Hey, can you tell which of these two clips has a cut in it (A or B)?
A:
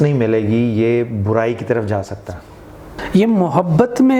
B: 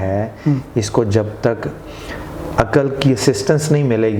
A